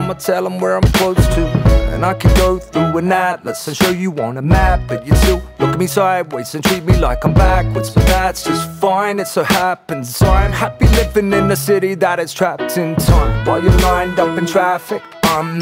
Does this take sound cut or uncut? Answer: uncut